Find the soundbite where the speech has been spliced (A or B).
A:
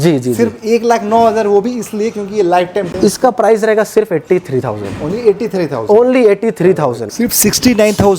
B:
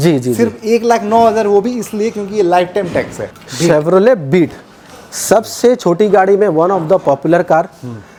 A